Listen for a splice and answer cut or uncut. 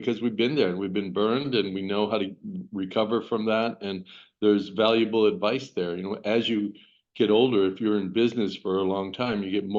uncut